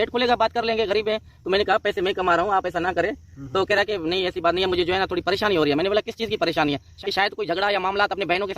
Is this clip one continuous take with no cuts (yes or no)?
no